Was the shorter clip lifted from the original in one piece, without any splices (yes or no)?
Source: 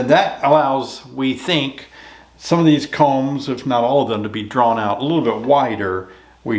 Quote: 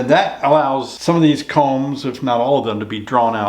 no